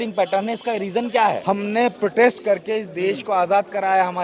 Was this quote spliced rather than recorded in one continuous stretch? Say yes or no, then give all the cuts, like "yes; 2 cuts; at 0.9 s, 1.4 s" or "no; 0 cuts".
yes; 1 cut; at 1.4 s